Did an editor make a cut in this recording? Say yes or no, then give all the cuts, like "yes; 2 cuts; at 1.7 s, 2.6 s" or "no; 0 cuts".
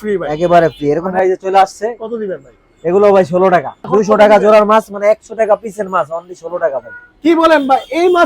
yes; 2 cuts; at 1.1 s, 3.8 s